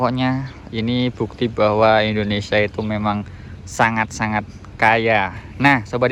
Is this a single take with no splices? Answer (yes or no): yes